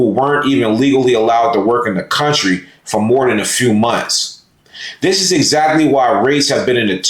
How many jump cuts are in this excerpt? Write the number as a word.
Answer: zero